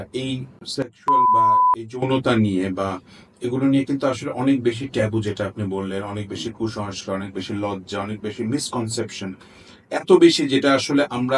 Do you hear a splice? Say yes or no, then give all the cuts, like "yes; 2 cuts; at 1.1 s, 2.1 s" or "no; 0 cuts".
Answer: yes; 2 cuts; at 0.9 s, 2.0 s